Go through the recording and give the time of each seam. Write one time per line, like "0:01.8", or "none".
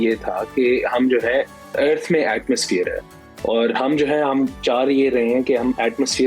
none